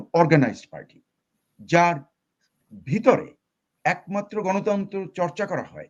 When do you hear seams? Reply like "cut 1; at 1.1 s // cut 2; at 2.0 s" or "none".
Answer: none